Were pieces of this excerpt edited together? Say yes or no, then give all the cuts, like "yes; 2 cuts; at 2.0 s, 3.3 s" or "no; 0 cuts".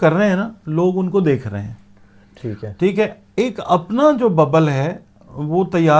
no; 0 cuts